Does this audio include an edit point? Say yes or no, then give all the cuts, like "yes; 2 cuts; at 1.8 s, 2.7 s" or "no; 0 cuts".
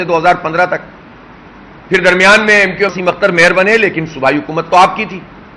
yes; 1 cut; at 2.9 s